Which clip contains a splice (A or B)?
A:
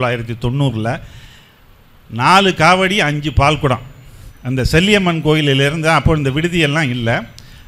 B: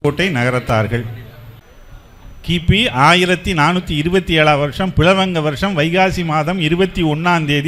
B